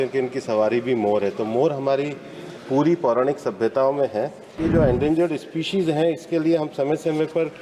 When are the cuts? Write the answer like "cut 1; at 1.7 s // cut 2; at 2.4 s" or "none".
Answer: cut 1; at 4.6 s